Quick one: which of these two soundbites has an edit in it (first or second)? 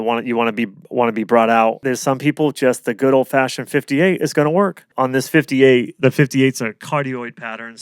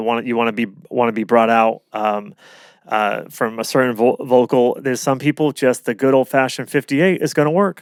first